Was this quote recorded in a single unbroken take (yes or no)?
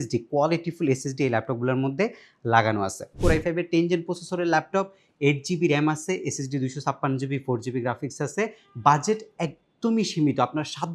no